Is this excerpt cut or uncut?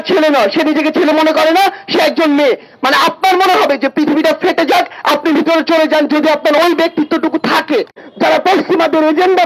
cut